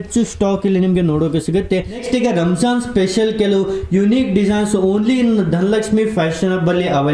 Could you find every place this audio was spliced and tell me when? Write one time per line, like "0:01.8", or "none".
0:02.0